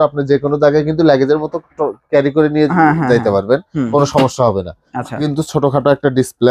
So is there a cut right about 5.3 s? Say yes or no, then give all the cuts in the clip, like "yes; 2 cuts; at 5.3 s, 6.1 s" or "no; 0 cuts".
yes; 1 cut; at 5.3 s